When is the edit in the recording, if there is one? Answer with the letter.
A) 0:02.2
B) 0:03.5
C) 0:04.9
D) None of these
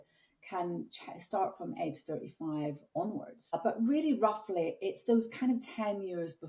B